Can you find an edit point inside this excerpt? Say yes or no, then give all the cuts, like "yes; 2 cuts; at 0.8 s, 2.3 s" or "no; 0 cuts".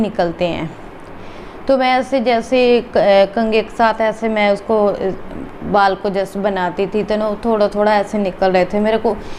no; 0 cuts